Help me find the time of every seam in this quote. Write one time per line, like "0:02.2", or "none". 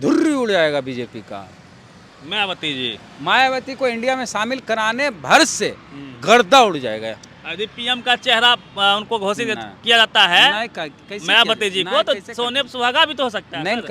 none

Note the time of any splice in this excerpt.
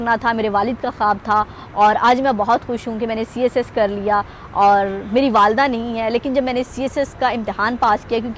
none

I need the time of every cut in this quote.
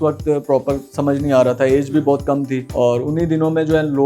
0:02.6

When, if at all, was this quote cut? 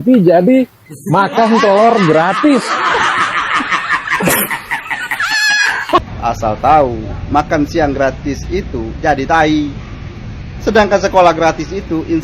0:06.0

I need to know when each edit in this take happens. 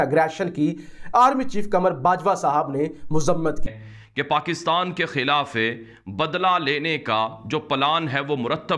0:03.6

